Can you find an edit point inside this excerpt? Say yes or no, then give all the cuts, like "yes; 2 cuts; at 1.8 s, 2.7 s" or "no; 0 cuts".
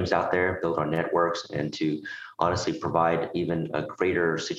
no; 0 cuts